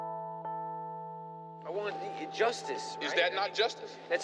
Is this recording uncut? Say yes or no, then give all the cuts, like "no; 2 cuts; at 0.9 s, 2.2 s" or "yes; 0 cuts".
no; 1 cut; at 0.9 s